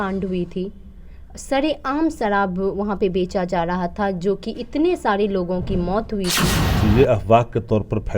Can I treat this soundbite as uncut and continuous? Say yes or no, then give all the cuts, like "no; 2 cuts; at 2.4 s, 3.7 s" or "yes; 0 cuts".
no; 1 cut; at 6.6 s